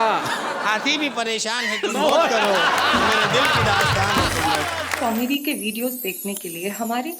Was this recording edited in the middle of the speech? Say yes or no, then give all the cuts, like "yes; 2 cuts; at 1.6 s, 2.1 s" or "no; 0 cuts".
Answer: yes; 1 cut; at 4.9 s